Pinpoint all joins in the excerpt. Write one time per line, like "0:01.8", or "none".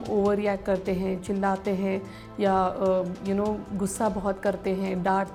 none

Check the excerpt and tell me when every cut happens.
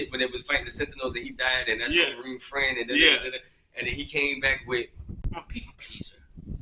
0:05.2

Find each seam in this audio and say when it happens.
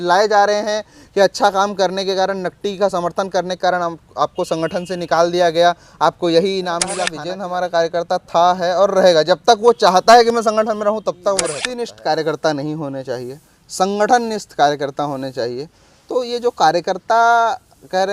0:07.1
0:11.6

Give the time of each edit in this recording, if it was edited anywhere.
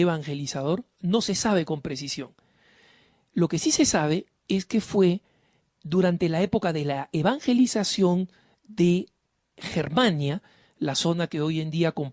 0:03.5

